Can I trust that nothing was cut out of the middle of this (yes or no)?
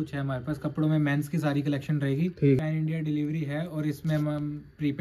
no